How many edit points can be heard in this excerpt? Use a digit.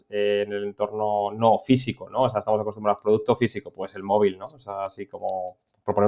0